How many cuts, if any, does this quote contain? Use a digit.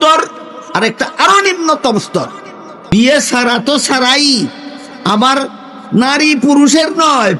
1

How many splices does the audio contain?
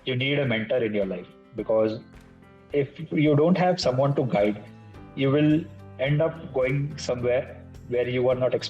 1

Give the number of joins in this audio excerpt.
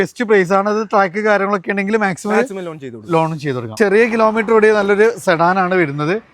1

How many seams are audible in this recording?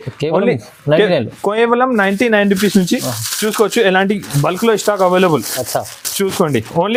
0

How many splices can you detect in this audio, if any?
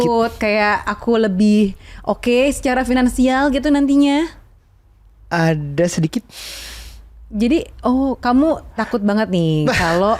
0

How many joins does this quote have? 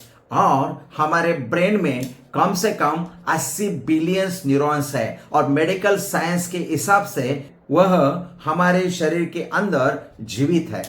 1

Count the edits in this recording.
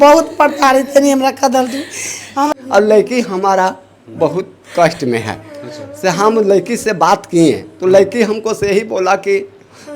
1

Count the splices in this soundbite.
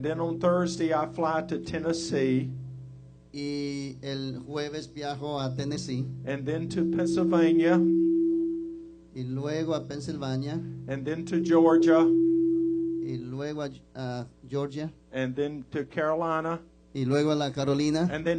1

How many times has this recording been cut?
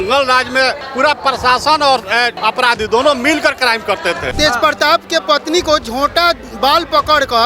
1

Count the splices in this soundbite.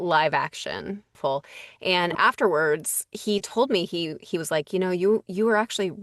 1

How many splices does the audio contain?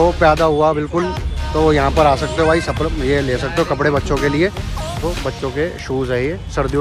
1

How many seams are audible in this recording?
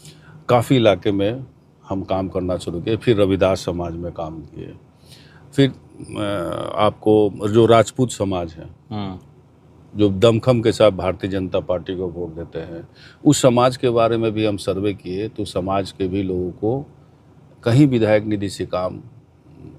0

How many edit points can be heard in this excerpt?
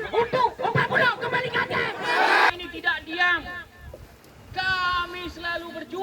1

